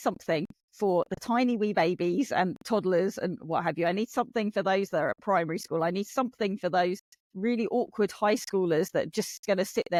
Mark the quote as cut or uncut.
uncut